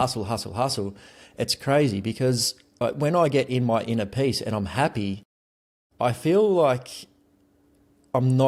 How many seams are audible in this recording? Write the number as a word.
zero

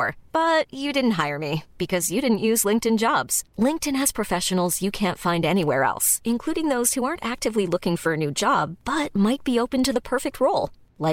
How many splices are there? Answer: zero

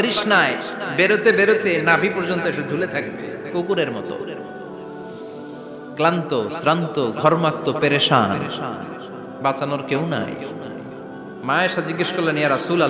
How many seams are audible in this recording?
two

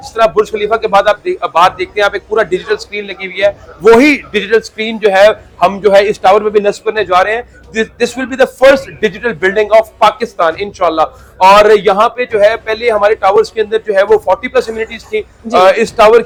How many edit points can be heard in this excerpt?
zero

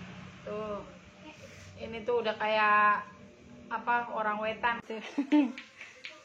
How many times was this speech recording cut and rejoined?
one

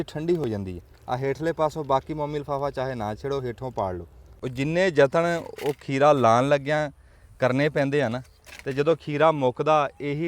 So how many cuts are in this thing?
one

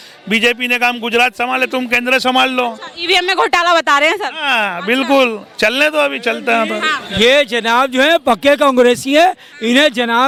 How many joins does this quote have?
zero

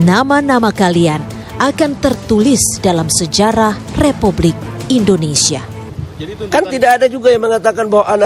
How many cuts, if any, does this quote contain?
one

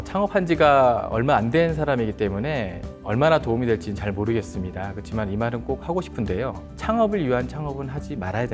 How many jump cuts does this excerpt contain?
zero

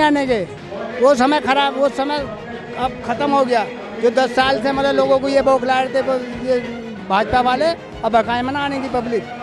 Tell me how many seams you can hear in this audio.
zero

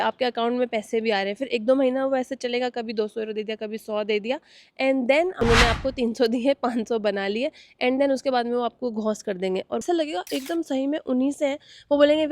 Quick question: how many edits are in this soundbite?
two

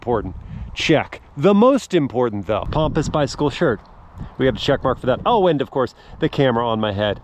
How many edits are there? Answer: one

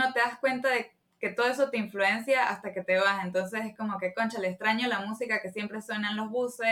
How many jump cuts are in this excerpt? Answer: zero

